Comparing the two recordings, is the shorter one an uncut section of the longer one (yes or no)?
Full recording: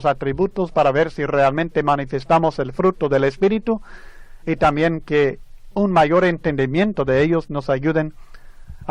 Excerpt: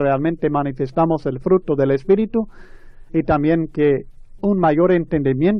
yes